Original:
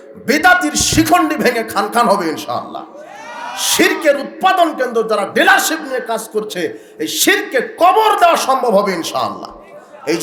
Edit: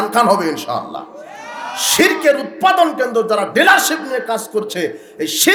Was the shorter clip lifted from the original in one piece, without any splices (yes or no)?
yes